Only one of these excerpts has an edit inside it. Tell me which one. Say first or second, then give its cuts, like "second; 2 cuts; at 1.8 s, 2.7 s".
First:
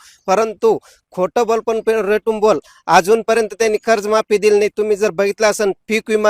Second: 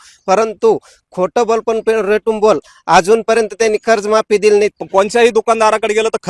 second; 1 cut; at 4.8 s